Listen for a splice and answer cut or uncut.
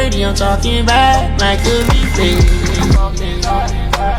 uncut